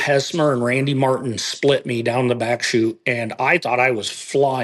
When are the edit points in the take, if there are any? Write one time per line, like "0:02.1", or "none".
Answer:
none